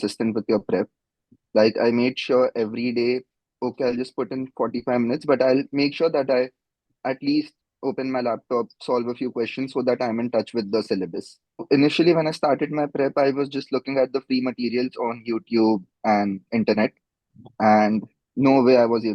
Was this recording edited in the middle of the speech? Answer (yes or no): yes